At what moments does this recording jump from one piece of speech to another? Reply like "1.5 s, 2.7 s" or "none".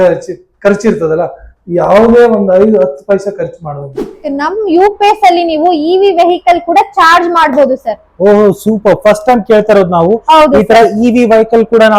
4.2 s